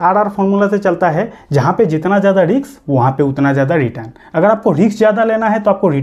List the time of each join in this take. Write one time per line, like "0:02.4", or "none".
none